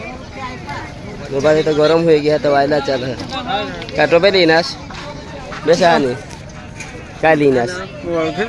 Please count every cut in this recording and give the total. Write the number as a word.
zero